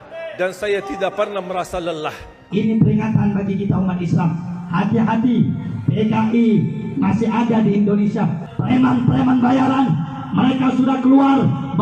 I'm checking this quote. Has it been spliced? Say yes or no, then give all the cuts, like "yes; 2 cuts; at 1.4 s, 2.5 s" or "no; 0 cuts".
yes; 2 cuts; at 2.3 s, 8.5 s